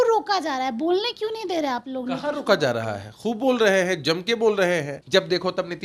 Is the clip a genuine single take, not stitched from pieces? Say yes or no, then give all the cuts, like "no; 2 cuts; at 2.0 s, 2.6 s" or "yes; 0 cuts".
no; 1 cut; at 5.0 s